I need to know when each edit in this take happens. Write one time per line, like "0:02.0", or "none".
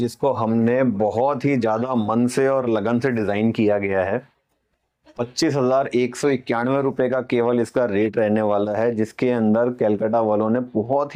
none